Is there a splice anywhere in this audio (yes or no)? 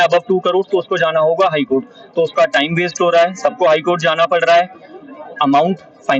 no